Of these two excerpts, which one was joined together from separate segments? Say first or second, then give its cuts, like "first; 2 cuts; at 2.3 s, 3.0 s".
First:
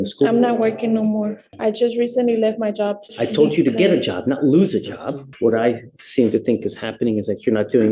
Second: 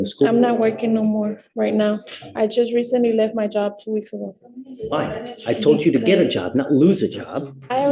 first; 3 cuts; at 1.4 s, 3.0 s, 5.3 s